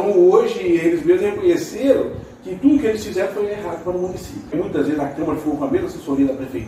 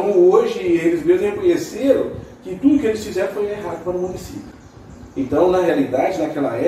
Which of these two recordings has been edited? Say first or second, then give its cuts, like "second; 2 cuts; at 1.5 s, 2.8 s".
first; 1 cut; at 4.5 s